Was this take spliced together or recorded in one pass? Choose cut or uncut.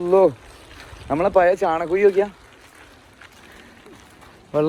uncut